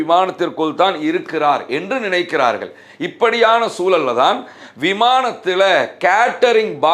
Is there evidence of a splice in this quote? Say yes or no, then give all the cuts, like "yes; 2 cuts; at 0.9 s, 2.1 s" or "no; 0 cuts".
no; 0 cuts